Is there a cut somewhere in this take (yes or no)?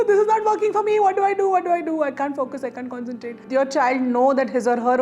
yes